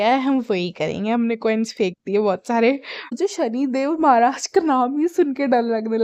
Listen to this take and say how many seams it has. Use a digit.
1